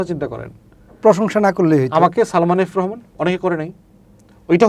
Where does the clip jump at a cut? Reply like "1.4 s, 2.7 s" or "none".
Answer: none